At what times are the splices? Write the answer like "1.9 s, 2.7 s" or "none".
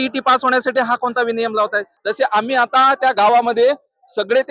1.9 s